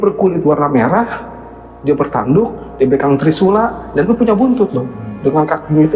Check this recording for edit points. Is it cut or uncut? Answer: uncut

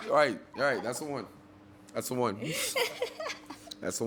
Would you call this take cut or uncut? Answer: uncut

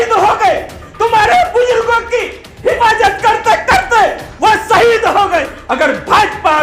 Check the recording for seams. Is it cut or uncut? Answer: cut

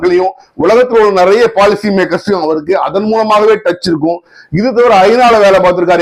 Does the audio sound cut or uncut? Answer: uncut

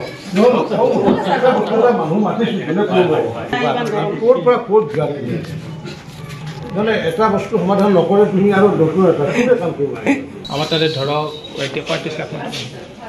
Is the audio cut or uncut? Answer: uncut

